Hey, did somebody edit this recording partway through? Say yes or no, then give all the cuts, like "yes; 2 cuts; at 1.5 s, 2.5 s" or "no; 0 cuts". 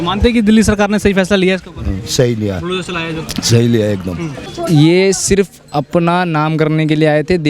yes; 1 cut; at 4.5 s